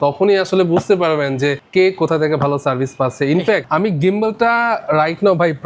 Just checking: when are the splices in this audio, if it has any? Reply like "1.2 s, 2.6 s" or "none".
1.6 s, 3.7 s